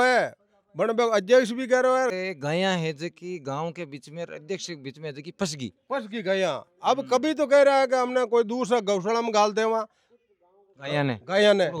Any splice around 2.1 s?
yes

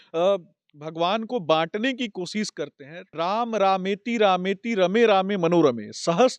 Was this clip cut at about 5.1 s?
no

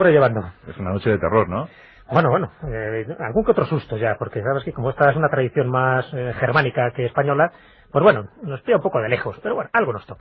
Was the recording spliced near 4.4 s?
yes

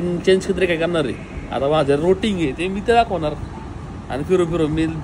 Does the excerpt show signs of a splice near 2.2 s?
no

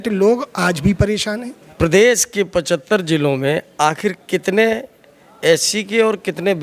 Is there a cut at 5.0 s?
no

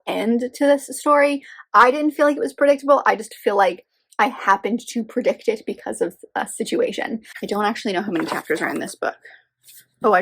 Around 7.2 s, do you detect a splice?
yes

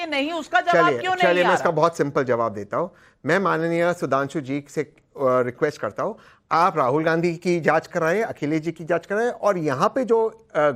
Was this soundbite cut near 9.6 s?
yes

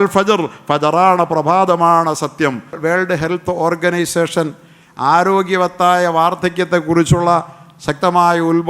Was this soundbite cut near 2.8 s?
yes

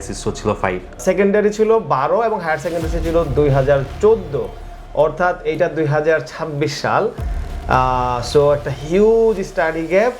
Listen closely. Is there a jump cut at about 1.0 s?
yes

